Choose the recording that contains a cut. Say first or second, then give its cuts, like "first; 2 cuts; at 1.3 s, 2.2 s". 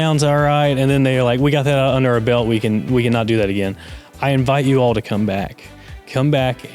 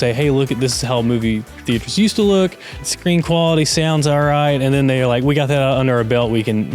second; 1 cut; at 2.7 s